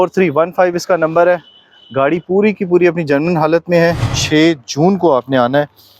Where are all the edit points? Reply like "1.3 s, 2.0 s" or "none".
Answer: 4.2 s